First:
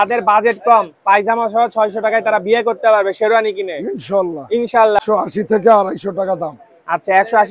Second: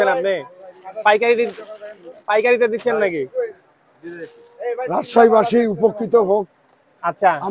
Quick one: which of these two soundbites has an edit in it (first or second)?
first